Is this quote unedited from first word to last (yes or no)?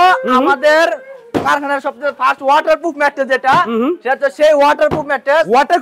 yes